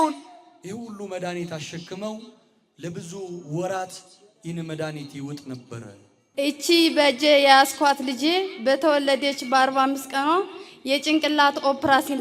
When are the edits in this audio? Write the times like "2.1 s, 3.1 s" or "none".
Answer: 6.3 s

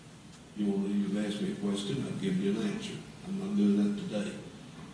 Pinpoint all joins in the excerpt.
1.0 s

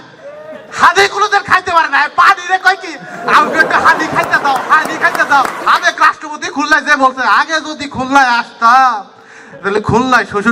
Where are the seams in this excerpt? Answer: 5.5 s

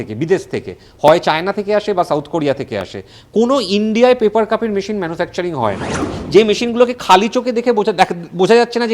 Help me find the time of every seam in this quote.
6.1 s

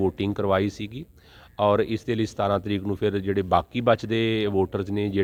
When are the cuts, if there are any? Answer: none

